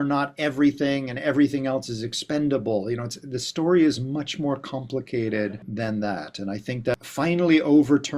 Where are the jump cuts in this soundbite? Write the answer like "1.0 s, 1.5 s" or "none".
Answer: 5.7 s, 6.9 s